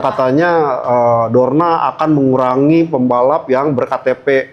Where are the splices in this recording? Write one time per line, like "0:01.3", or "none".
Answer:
none